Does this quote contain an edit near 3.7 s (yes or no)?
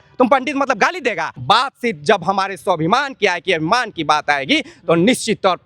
no